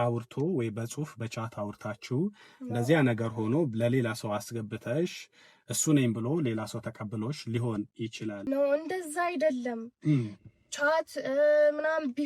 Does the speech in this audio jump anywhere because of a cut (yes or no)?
yes